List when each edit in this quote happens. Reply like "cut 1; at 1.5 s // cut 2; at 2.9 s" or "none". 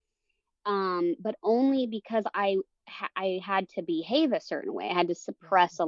none